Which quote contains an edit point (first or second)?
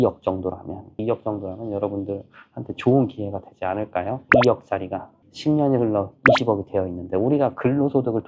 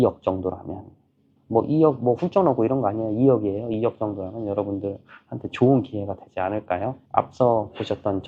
first